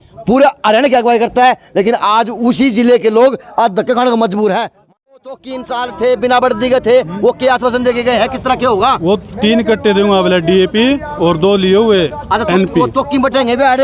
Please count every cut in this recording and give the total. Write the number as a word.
one